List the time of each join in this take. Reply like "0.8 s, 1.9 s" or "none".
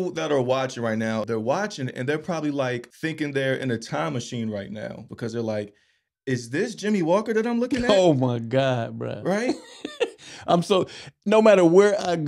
1.3 s, 2.9 s, 5.0 s